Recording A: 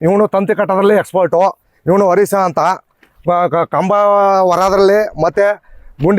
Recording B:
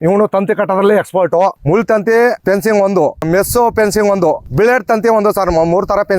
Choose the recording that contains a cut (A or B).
B